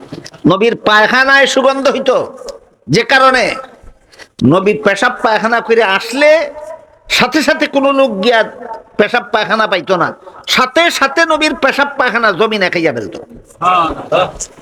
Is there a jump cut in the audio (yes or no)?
no